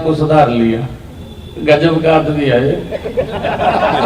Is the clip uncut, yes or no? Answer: yes